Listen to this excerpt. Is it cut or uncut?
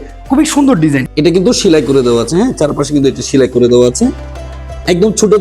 cut